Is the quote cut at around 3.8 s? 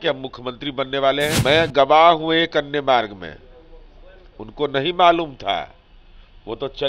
no; 1 cut; at 1.4 s

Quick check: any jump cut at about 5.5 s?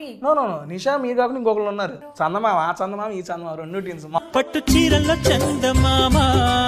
no; 2 cuts; at 2.0 s, 4.2 s

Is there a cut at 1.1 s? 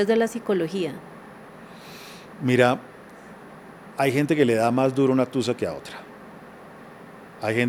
no; 0 cuts

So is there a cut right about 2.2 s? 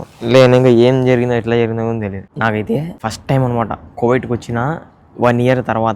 yes; 2 cuts; at 2.2 s, 2.9 s

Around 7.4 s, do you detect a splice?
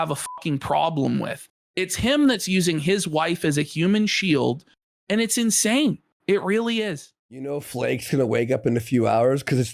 yes; 1 cut; at 7.4 s

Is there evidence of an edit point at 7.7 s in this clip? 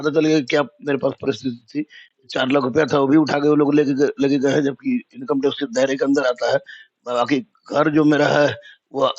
no; 0 cuts

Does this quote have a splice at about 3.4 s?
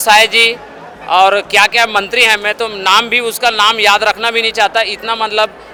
no; 0 cuts

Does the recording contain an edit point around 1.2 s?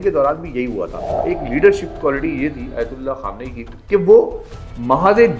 yes; 1 cut; at 1.2 s

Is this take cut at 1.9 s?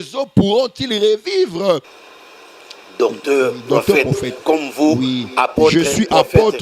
yes; 1 cut; at 1.9 s

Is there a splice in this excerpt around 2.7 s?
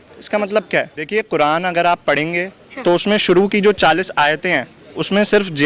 no; 1 cut; at 1.0 s

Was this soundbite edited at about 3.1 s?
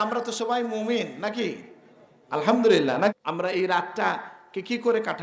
yes; 1 cut; at 3.1 s

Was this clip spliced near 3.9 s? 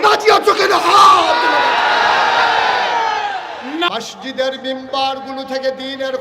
yes; 1 cut; at 3.9 s

